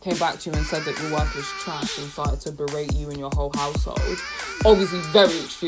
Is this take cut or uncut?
uncut